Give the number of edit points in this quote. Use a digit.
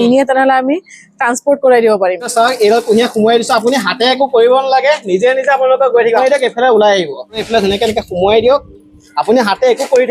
3